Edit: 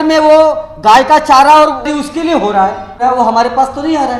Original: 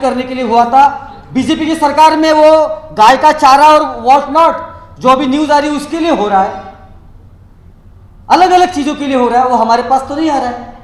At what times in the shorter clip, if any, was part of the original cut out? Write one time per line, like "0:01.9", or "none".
0:01.9
0:03.0